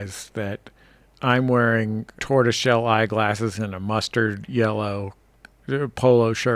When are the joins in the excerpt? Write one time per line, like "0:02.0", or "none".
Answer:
0:02.1